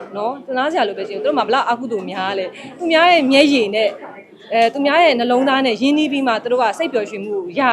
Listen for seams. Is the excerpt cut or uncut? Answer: uncut